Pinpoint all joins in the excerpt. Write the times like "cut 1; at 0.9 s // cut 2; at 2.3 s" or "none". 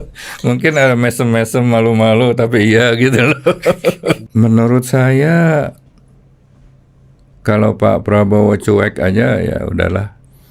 cut 1; at 4.2 s